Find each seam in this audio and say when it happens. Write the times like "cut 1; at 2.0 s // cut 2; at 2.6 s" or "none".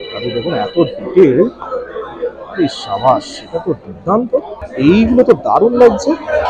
cut 1; at 4.6 s

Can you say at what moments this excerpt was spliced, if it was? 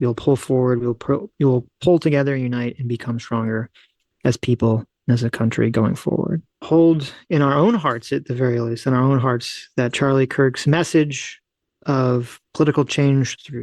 cut 1; at 6.5 s

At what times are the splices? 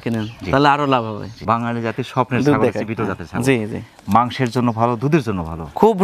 cut 1; at 1.3 s

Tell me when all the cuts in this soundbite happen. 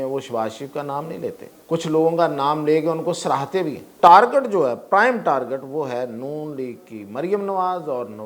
cut 1; at 1.5 s // cut 2; at 3.9 s

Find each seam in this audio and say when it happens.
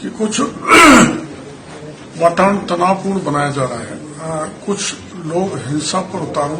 cut 1; at 4.0 s

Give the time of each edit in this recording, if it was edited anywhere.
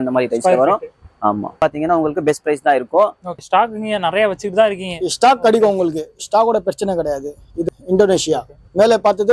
cut 1; at 1.6 s // cut 2; at 3.3 s // cut 3; at 7.6 s

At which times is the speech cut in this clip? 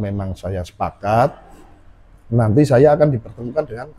none

